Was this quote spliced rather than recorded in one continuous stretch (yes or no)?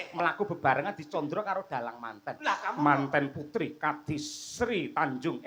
no